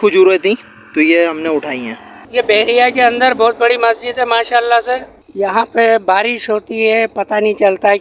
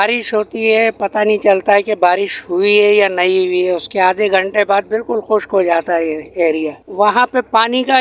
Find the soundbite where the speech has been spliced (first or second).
first